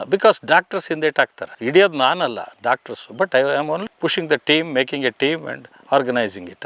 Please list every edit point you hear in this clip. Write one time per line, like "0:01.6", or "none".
none